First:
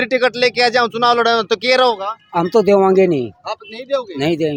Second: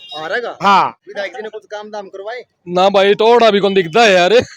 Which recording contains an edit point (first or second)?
second